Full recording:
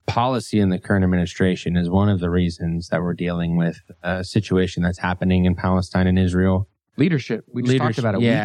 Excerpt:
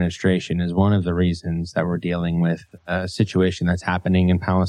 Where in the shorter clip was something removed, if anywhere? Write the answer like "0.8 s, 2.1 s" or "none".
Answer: none